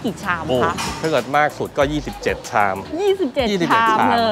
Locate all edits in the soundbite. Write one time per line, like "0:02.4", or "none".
none